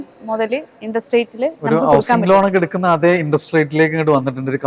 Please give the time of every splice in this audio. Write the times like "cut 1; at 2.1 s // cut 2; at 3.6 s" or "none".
none